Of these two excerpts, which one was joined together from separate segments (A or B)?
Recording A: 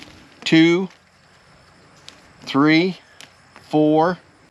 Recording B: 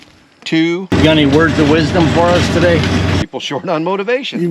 B